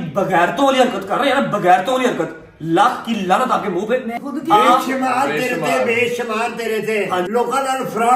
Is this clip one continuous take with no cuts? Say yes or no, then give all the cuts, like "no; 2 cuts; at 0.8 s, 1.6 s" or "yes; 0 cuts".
no; 2 cuts; at 4.2 s, 7.3 s